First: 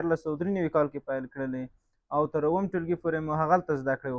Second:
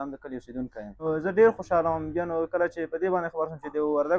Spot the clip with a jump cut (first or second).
second